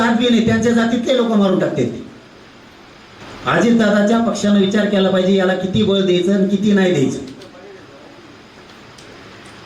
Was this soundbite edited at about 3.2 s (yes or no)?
yes